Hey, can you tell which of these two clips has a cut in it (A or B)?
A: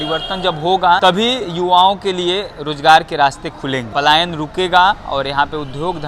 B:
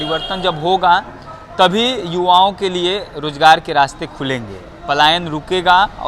A